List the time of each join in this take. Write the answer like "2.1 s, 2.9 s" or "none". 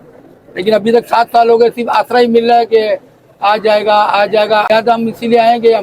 4.7 s